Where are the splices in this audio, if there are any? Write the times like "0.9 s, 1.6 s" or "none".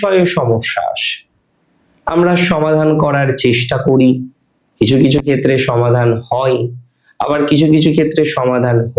none